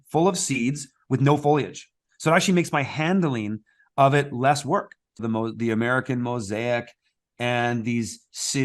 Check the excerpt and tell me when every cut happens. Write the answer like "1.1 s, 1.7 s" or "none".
5.1 s